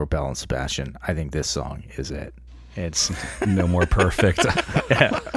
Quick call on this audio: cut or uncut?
uncut